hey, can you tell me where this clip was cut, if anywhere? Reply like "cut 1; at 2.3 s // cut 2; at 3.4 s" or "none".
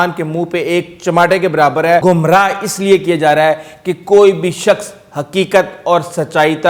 cut 1; at 2.0 s